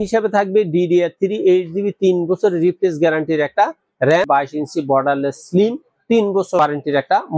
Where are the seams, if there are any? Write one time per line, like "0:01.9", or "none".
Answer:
0:04.3